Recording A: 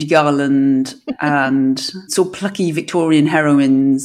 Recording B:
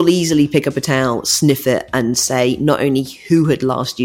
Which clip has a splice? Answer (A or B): A